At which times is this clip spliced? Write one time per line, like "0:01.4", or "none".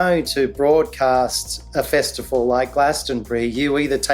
none